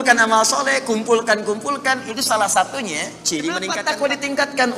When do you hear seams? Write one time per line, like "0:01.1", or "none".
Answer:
0:03.7